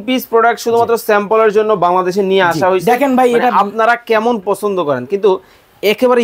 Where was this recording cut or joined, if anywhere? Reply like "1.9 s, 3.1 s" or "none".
none